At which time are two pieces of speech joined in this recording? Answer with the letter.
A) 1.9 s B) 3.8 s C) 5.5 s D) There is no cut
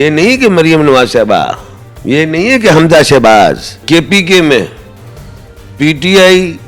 B